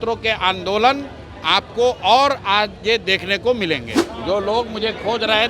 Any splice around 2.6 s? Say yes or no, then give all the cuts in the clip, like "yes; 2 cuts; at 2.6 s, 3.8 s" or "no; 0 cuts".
no; 1 cut; at 4.0 s